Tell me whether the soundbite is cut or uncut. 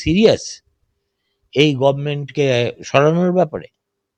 uncut